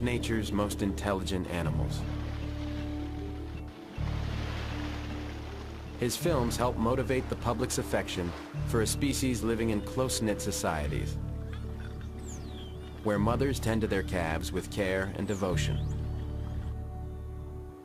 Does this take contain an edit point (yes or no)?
yes